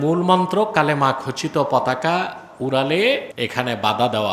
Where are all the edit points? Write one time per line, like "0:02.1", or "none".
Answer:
0:03.3